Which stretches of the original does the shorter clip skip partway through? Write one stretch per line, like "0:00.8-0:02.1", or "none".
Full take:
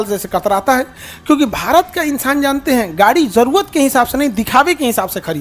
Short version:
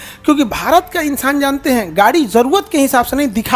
none